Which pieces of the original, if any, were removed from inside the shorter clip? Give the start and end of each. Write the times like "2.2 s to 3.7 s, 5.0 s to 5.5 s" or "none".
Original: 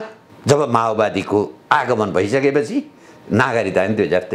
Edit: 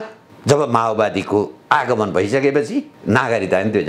2.9 s to 3.2 s